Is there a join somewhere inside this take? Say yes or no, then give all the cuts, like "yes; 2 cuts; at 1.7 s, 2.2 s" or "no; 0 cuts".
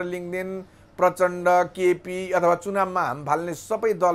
no; 0 cuts